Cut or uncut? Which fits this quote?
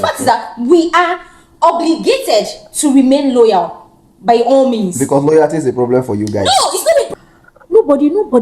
cut